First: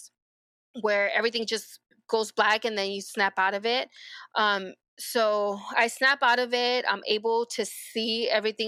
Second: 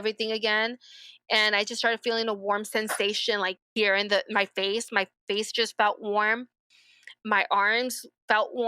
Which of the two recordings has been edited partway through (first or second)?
second